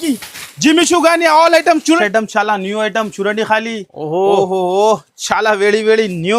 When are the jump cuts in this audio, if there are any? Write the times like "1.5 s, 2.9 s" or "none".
2.0 s